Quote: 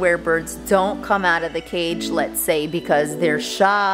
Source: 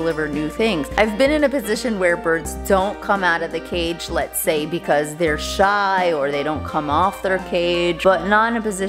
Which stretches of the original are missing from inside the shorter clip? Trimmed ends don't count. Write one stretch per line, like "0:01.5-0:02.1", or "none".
none

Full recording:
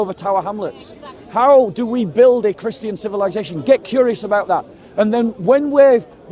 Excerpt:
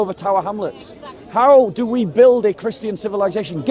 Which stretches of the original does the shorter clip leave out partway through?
none

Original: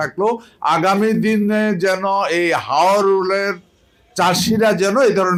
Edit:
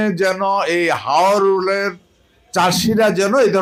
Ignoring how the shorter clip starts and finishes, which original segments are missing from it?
none

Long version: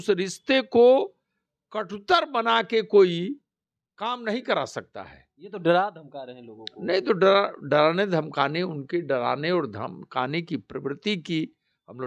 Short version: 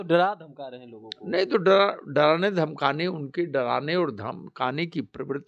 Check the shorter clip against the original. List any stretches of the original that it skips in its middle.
none

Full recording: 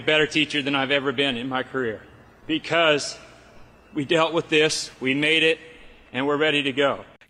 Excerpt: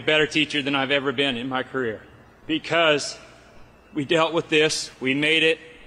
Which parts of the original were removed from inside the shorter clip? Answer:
none

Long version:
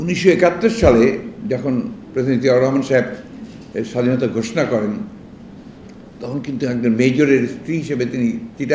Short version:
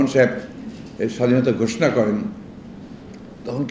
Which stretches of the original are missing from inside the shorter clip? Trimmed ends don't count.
none

